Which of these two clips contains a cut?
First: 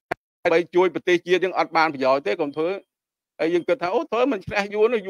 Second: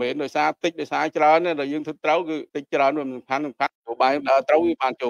second; 2 cuts; at 2.5 s, 3.8 s

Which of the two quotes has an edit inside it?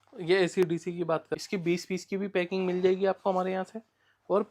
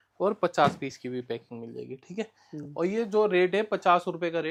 first; 1 cut; at 1.3 s

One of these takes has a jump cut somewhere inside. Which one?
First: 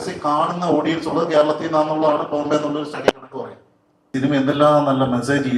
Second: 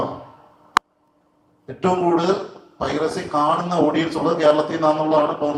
first; 1 cut; at 4.1 s

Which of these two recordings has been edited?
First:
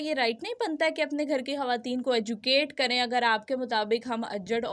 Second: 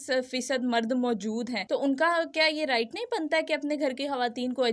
second; 1 cut; at 1.6 s

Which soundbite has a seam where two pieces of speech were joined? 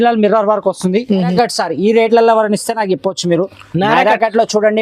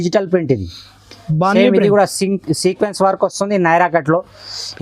first; 1 cut; at 1.3 s

